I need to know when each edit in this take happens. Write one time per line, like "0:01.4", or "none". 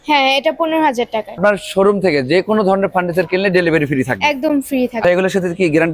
0:01.4
0:05.0